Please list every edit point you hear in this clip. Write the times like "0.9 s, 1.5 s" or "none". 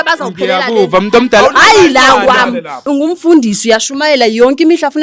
2.8 s